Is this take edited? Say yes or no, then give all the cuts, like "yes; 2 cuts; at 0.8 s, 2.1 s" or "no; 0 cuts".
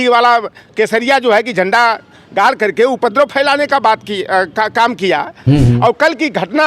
yes; 1 cut; at 5.5 s